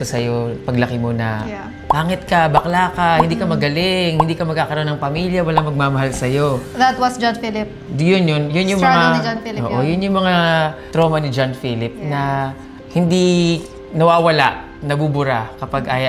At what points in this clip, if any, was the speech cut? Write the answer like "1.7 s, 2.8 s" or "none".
none